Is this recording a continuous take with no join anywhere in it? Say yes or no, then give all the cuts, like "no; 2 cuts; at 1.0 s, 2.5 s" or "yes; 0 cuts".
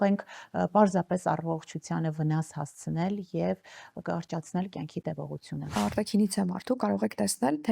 no; 1 cut; at 5.7 s